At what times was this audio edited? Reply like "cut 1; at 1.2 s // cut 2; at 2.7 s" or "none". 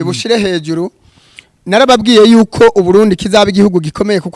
none